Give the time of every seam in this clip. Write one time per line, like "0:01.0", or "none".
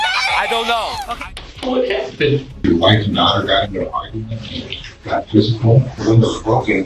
0:01.1
0:02.6
0:05.9